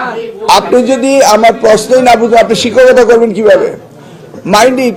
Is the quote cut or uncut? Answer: uncut